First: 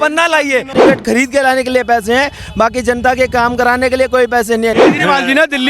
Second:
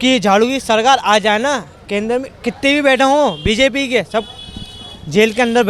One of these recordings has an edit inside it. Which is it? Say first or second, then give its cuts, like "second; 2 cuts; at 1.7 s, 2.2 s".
first; 2 cuts; at 0.8 s, 4.8 s